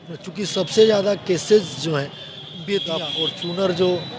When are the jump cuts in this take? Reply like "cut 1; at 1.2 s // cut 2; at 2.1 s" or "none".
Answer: cut 1; at 3.2 s

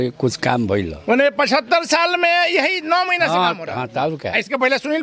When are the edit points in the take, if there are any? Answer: none

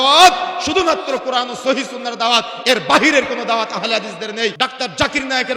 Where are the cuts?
cut 1; at 4.5 s

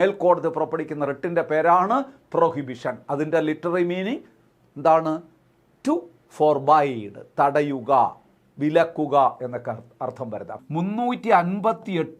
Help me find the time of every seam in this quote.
cut 1; at 10.6 s

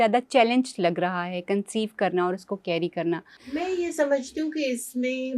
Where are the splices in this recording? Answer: cut 1; at 3.3 s

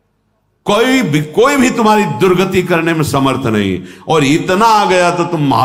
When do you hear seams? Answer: none

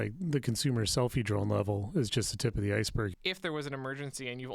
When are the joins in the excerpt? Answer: cut 1; at 3.2 s

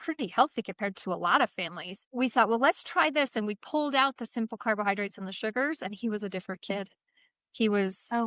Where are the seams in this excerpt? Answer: none

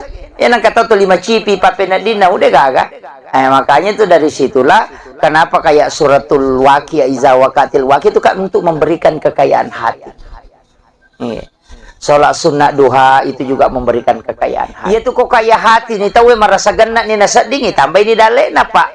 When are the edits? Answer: cut 1; at 14.7 s

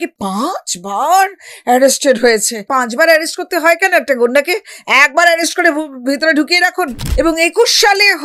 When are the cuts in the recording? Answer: cut 1; at 2.7 s // cut 2; at 7.0 s

